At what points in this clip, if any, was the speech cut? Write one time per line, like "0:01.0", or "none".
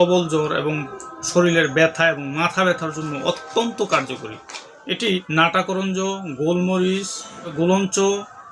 0:05.3
0:07.5